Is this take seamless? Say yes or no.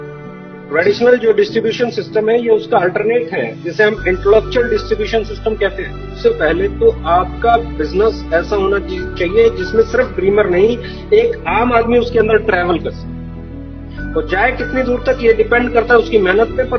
no